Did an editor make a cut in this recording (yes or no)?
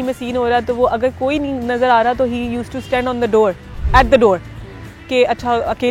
no